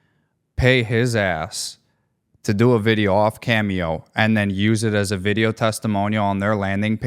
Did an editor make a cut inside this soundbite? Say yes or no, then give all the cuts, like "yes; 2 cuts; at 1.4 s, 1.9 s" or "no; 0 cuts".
no; 0 cuts